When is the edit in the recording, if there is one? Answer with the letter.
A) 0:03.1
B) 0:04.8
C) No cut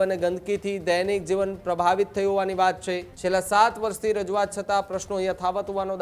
A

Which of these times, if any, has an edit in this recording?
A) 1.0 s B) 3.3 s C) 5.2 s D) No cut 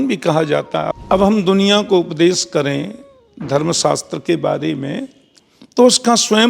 A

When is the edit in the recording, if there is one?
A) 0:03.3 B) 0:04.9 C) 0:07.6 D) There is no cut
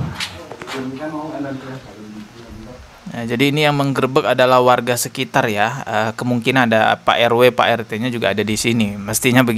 D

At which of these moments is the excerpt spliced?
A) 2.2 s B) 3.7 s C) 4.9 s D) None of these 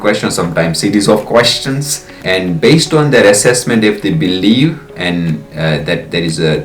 A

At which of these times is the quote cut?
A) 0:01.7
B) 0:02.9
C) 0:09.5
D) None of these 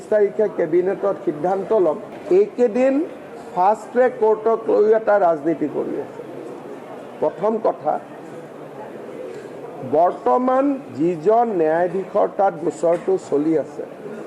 A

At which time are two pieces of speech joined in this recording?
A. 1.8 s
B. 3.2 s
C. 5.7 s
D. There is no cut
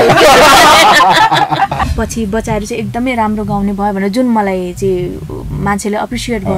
A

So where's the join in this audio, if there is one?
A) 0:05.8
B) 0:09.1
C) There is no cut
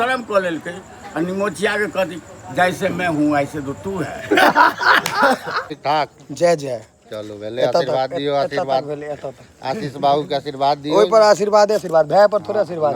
A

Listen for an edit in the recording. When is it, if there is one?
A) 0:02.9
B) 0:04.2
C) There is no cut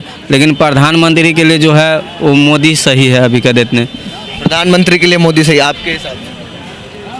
C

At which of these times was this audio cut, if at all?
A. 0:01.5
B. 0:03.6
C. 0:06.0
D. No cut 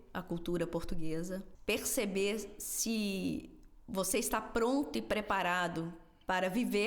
A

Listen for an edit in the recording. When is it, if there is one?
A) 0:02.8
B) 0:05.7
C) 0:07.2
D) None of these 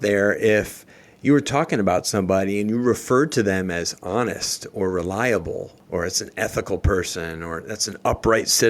B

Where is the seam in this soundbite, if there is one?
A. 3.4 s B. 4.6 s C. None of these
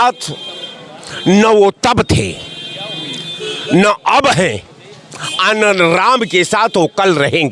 C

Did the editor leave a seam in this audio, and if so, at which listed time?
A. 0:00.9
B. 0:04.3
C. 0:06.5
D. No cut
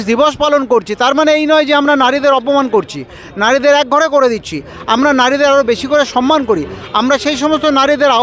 D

